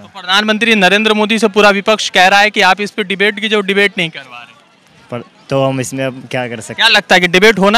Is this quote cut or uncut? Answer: uncut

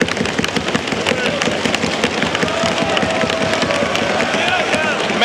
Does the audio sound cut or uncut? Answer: uncut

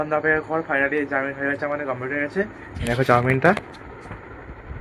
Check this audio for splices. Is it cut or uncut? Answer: uncut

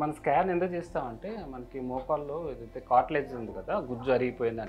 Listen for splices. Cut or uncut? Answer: uncut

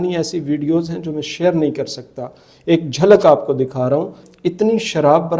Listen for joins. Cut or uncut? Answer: cut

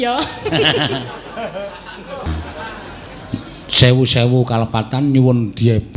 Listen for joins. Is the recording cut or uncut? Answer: cut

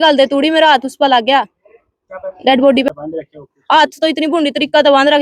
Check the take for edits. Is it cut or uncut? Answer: cut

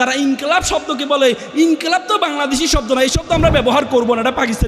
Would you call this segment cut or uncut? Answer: uncut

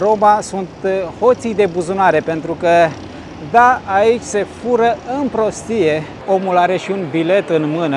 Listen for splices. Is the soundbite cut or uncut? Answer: cut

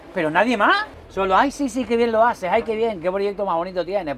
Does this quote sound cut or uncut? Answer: cut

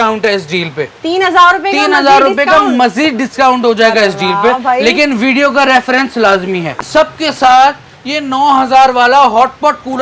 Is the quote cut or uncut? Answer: cut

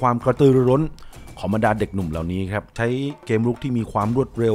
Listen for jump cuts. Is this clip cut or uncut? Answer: cut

